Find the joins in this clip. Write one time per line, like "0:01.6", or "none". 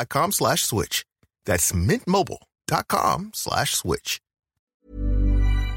0:04.9